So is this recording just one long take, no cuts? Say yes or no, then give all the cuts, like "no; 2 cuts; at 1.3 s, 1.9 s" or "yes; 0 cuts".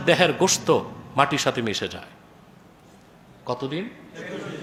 yes; 0 cuts